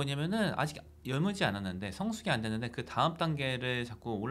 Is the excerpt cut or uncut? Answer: uncut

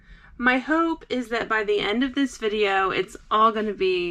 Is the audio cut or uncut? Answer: uncut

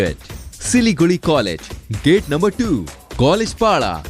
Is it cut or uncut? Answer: uncut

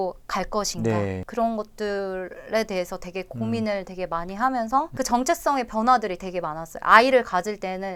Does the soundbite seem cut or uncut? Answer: uncut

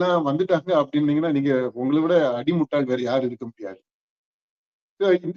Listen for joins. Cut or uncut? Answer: uncut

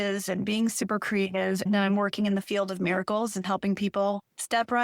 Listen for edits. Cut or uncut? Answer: cut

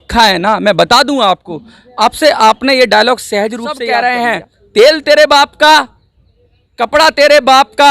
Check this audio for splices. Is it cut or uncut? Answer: cut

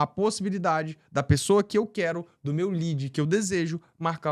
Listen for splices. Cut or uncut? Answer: uncut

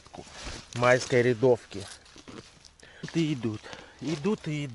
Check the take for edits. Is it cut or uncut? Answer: cut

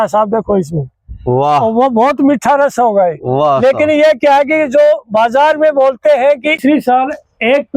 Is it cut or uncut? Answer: cut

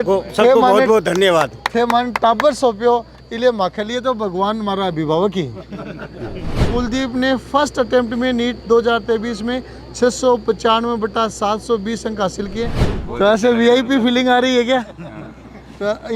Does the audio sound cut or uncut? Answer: cut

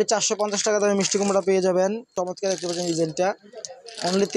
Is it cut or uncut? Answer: cut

